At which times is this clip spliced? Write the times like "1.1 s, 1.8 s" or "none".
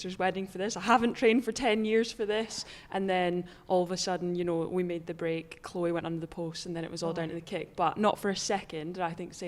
none